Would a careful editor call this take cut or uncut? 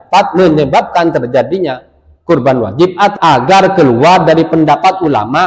cut